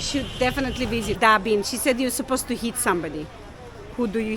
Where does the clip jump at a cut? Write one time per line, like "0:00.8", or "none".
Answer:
0:01.1